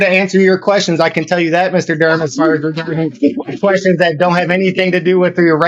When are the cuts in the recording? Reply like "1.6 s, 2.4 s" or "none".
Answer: none